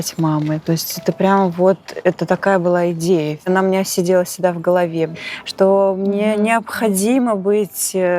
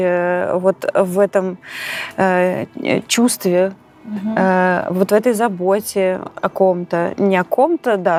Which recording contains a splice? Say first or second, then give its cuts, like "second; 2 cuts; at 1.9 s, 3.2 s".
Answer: first; 2 cuts; at 3.5 s, 5.1 s